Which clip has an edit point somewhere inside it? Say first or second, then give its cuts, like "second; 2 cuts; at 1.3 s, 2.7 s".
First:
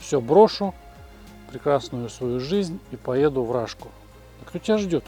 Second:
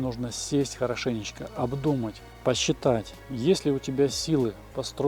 second; 2 cuts; at 2.2 s, 3.2 s